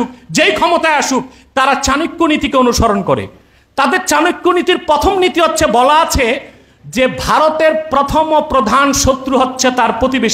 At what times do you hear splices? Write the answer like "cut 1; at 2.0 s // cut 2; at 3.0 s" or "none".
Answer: none